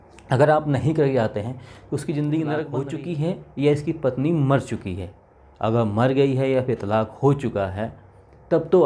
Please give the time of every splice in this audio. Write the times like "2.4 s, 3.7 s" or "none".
2.8 s